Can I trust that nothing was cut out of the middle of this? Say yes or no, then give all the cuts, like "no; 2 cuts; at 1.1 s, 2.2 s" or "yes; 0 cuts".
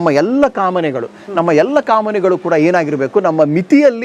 yes; 0 cuts